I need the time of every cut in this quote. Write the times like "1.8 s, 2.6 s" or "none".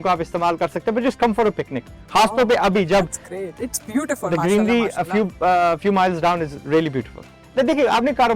7.4 s